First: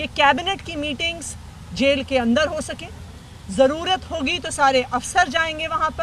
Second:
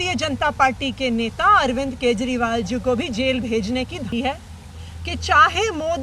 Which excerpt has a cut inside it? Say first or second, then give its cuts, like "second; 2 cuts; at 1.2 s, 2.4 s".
second; 1 cut; at 4.1 s